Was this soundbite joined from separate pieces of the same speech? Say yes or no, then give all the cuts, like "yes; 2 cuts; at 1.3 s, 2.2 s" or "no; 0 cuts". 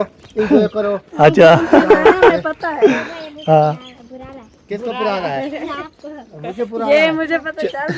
no; 0 cuts